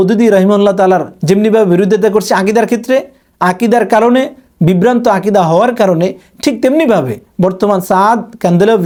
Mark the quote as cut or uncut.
uncut